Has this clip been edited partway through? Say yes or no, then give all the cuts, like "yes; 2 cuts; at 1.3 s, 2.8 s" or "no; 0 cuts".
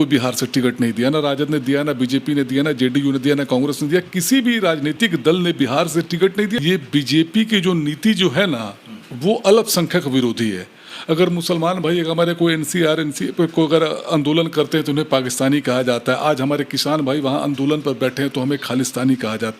yes; 1 cut; at 6.6 s